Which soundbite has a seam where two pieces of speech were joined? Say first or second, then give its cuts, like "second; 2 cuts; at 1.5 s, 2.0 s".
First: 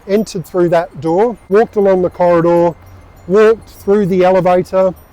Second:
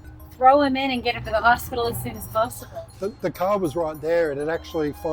first; 1 cut; at 1.5 s